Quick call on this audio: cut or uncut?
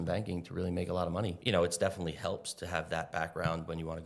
cut